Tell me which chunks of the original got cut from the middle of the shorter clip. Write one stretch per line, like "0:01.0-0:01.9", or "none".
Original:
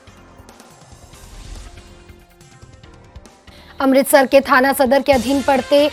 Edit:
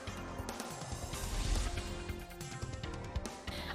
none